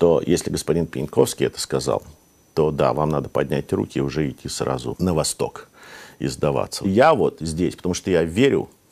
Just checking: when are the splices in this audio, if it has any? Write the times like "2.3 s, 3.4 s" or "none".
5.0 s, 6.8 s